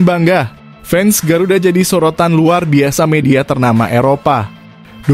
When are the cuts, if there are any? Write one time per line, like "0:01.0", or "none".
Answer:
none

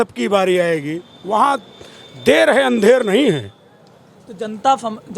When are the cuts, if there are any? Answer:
none

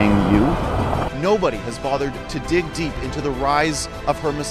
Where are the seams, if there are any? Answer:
0:01.1

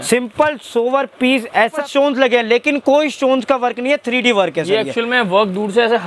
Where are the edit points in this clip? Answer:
0:01.9

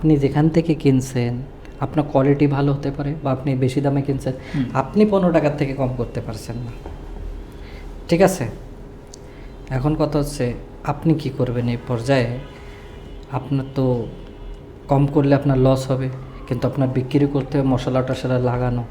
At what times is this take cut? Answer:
none

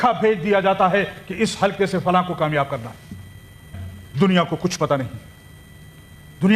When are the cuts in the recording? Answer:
none

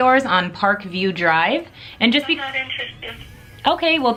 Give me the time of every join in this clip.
none

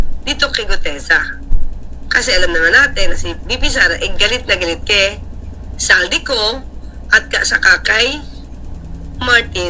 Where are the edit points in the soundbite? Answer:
none

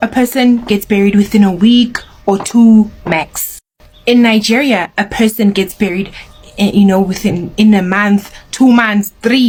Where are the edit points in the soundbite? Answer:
none

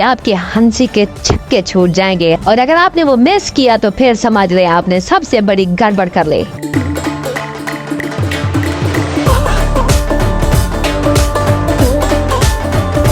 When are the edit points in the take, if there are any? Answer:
none

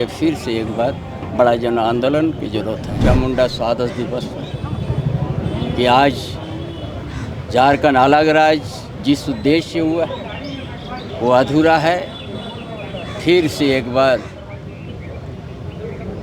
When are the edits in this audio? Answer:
0:02.9

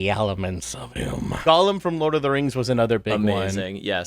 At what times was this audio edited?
0:01.3

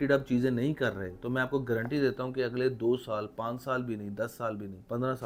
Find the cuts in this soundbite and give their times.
none

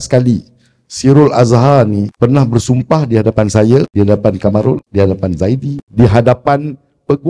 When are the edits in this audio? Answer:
0:02.1
0:03.9
0:04.9
0:05.8

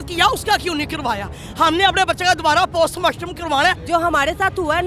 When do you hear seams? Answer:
0:03.8

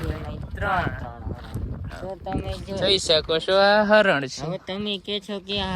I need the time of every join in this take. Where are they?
0:01.9

